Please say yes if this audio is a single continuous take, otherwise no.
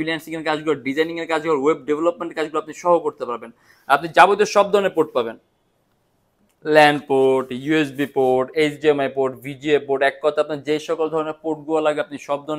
yes